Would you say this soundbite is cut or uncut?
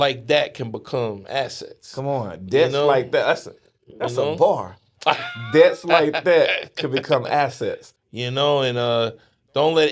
cut